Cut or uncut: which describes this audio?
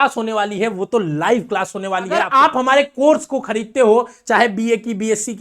cut